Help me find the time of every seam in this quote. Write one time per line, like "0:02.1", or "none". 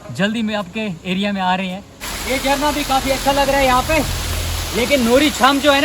0:02.1